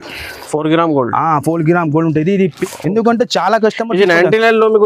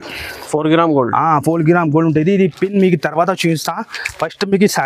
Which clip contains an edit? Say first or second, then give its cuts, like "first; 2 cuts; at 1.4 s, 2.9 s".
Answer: first; 1 cut; at 2.6 s